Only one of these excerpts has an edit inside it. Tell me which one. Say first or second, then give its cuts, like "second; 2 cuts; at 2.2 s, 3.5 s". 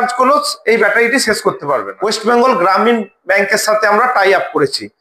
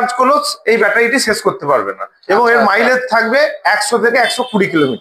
first; 1 cut; at 1.9 s